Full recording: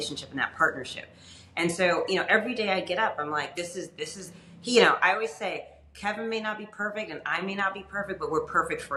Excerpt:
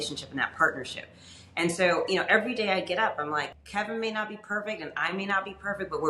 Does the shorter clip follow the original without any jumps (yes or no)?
no